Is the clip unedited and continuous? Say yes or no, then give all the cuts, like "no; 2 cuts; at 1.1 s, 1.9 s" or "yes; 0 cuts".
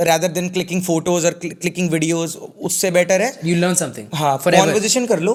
yes; 0 cuts